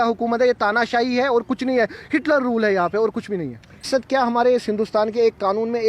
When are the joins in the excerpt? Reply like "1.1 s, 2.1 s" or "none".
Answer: 3.9 s